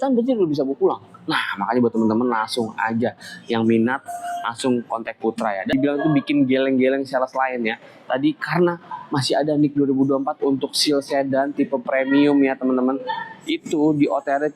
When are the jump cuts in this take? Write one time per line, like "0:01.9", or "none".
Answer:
0:05.7